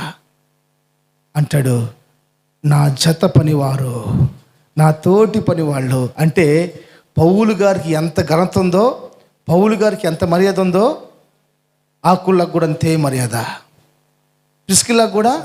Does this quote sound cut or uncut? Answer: uncut